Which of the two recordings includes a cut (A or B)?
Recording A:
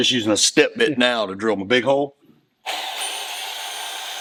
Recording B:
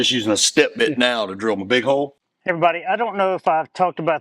B